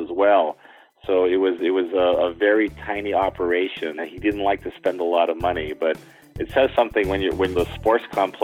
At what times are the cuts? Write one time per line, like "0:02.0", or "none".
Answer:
0:04.0
0:07.5